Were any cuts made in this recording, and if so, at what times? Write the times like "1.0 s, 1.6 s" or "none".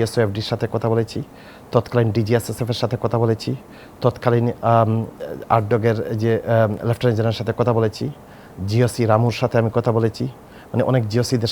none